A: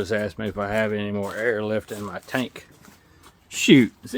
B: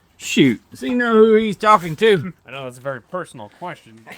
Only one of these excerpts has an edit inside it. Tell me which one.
B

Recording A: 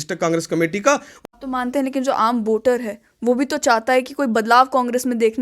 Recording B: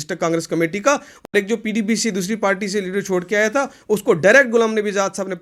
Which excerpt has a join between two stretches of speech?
A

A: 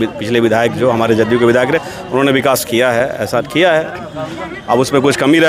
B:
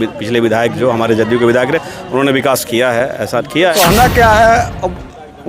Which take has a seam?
B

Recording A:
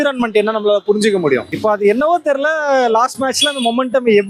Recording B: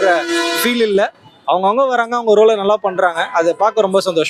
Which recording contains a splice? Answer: A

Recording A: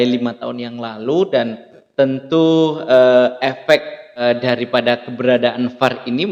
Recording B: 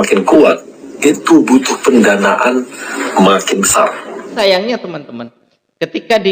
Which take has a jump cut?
B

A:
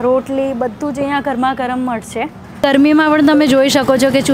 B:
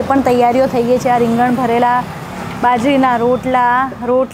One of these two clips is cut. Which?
A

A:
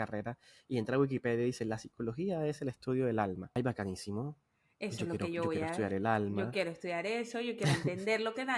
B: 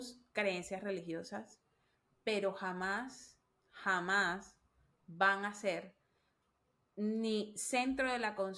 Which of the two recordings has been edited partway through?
A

